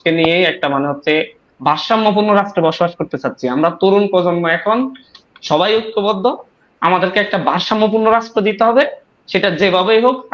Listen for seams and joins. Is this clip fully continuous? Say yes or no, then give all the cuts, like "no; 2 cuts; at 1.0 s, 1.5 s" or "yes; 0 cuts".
yes; 0 cuts